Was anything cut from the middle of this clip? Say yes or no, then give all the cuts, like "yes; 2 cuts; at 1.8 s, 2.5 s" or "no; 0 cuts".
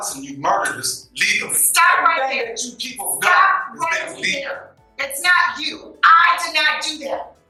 no; 0 cuts